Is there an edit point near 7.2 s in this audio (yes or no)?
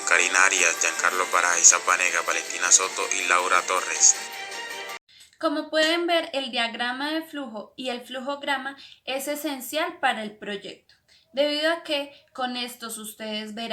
no